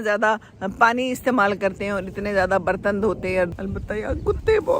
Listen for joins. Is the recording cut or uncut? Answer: cut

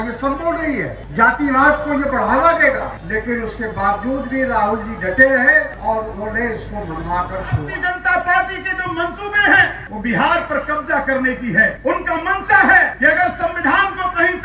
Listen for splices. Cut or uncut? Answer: cut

